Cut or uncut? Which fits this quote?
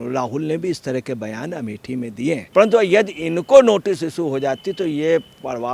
cut